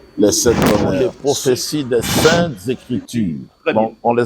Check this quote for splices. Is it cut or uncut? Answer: cut